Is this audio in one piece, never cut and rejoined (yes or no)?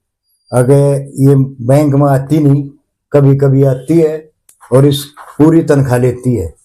yes